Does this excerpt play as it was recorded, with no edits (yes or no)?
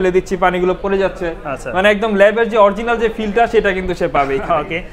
yes